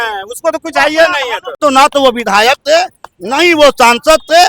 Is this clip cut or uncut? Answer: cut